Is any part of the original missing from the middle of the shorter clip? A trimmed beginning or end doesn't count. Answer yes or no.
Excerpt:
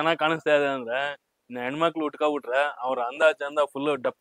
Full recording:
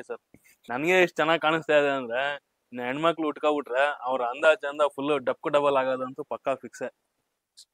no